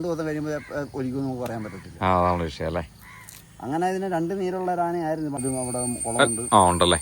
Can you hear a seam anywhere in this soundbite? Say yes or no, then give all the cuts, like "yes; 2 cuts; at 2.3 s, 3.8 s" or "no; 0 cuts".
yes; 1 cut; at 5.3 s